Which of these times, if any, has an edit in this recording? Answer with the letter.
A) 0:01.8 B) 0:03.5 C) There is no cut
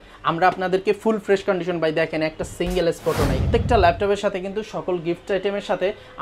B